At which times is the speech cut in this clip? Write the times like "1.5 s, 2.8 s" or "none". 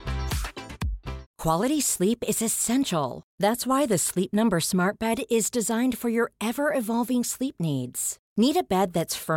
1.2 s